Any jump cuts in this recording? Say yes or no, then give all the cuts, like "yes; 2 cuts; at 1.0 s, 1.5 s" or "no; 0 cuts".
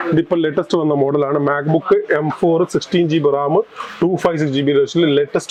no; 0 cuts